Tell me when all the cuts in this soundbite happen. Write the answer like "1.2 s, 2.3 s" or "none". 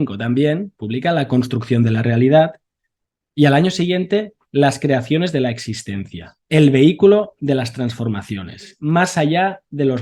6.3 s, 8.8 s